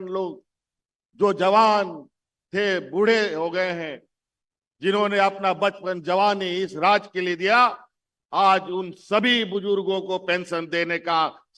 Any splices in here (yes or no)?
no